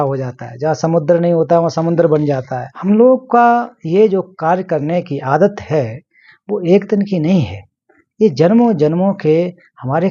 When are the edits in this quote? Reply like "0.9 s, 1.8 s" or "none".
2.7 s